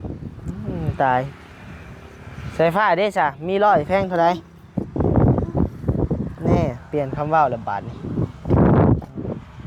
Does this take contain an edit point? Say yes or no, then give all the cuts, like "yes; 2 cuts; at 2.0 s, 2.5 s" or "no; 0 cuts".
no; 0 cuts